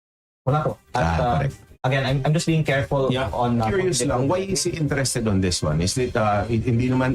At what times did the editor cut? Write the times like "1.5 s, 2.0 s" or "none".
3.6 s